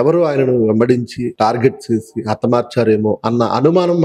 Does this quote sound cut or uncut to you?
cut